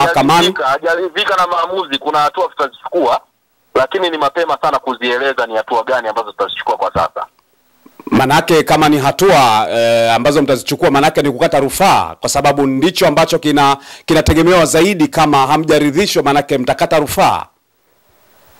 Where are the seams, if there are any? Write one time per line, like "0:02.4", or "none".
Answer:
none